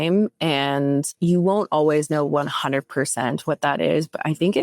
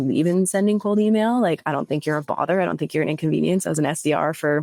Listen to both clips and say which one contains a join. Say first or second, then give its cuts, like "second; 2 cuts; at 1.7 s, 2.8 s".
first; 1 cut; at 1.1 s